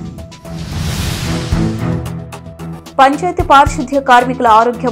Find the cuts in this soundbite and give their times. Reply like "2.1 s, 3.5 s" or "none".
2.0 s